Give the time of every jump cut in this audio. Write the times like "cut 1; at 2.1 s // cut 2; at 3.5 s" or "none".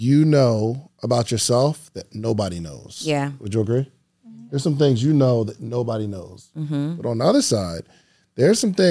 none

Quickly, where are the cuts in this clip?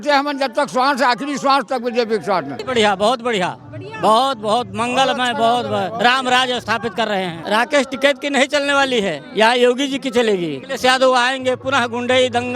cut 1; at 2.6 s // cut 2; at 7.4 s // cut 3; at 10.6 s

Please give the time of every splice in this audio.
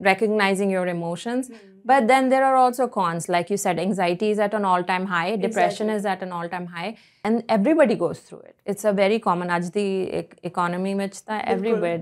cut 1; at 7.2 s

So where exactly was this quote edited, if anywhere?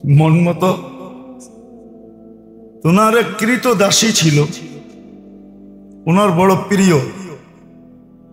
cut 1; at 7.4 s

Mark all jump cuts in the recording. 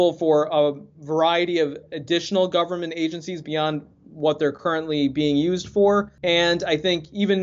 cut 1; at 6.1 s

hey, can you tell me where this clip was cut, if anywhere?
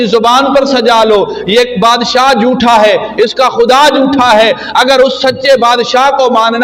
none

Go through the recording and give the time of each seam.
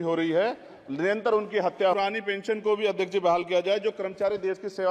cut 1; at 1.9 s

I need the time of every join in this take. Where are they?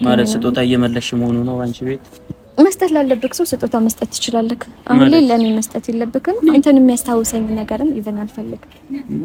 none

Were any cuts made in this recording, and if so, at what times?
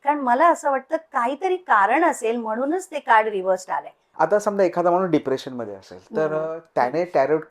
cut 1; at 4.0 s

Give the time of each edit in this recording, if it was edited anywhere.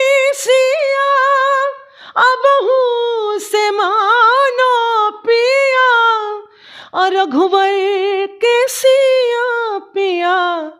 none

